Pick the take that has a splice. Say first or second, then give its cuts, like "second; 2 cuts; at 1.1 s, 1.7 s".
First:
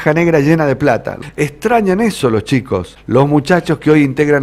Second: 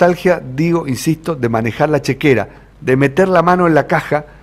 first; 2 cuts; at 1.1 s, 2.9 s